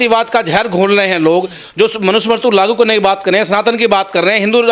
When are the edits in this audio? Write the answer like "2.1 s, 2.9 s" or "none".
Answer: none